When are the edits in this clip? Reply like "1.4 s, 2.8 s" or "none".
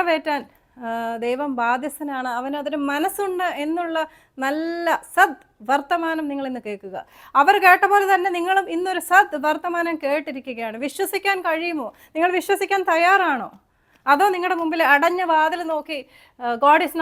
none